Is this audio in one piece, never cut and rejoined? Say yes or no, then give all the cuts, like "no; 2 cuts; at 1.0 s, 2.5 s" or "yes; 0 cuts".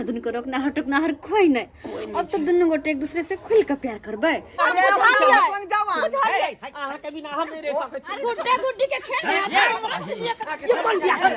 no; 1 cut; at 4.6 s